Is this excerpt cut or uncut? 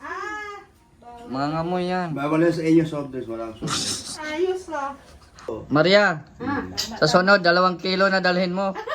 cut